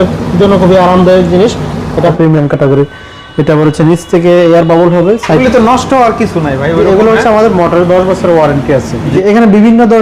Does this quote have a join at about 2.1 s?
yes; 3 cuts; at 2.1 s, 5.4 s, 9.1 s

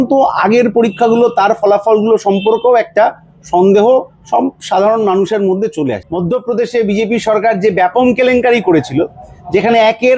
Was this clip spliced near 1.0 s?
no; 1 cut; at 6.0 s

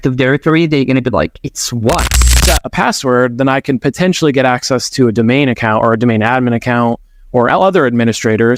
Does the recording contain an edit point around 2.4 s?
yes; 1 cut; at 2.4 s

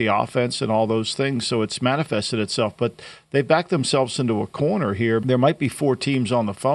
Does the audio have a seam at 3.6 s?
no; 1 cut; at 5.2 s

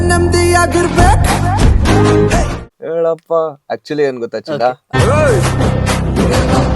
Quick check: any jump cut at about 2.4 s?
yes; 2 cuts; at 2.4 s, 4.8 s

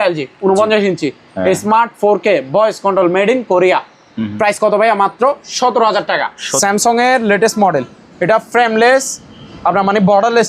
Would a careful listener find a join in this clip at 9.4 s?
no; 1 cut; at 6.4 s

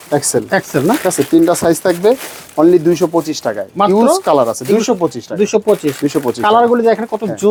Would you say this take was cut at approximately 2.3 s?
no; 0 cuts

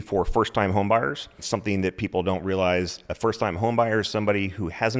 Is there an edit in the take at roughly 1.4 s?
yes; 1 cut; at 1.4 s

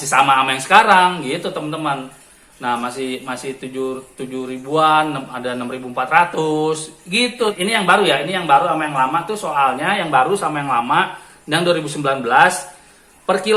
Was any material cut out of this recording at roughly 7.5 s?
yes; 1 cut; at 7.5 s

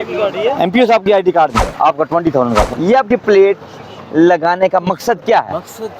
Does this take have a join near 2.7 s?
yes; 2 cuts; at 1.6 s, 2.7 s

